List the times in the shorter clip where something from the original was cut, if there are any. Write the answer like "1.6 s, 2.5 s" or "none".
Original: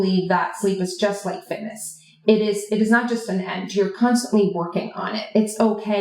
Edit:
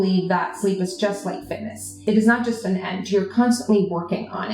2.0 s